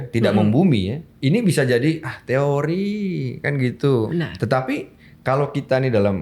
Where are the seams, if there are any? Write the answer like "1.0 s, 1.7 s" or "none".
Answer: 1.0 s, 4.1 s

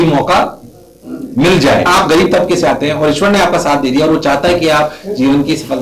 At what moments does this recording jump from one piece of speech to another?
1.9 s

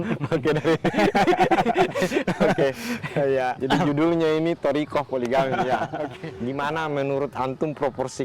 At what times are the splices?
6.2 s

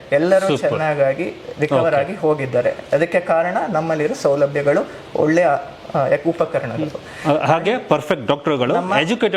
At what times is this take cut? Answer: none

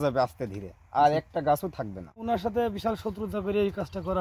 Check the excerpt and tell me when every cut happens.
2.2 s

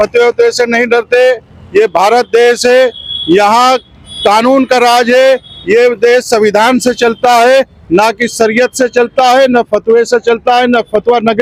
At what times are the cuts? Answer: none

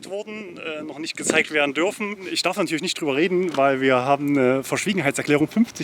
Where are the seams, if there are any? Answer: 2.2 s

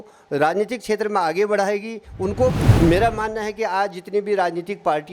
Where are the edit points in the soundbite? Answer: 2.6 s

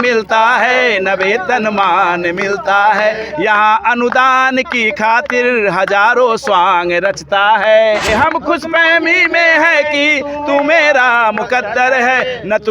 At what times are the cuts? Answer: 8.1 s

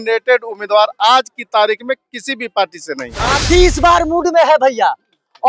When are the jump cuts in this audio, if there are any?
3.3 s

